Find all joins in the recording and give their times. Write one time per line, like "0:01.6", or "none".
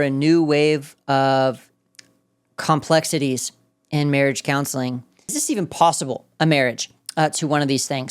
0:05.4